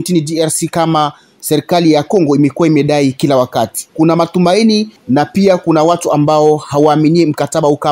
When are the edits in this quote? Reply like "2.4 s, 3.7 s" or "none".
3.8 s, 4.9 s